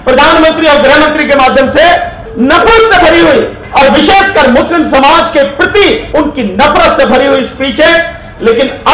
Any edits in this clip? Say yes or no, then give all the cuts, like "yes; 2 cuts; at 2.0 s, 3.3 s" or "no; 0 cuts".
yes; 3 cuts; at 2.2 s, 3.6 s, 6.0 s